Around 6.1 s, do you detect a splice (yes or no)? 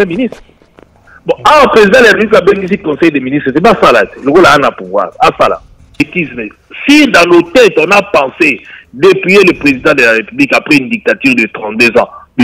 yes